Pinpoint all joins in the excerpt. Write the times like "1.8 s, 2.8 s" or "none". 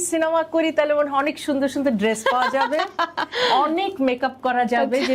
none